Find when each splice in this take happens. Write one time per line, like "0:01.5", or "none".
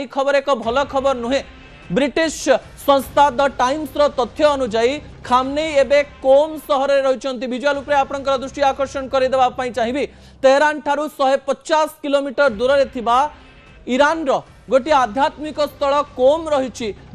0:10.8